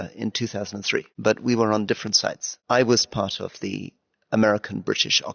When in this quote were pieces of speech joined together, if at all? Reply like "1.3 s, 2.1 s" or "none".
1.1 s, 2.5 s